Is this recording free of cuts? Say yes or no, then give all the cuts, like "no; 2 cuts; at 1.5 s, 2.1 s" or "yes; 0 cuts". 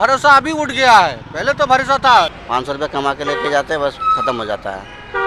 no; 1 cut; at 2.4 s